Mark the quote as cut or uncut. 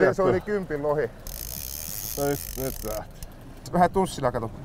cut